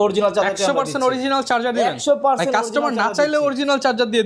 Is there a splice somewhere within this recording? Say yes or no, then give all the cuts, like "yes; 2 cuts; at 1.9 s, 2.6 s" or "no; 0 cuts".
no; 0 cuts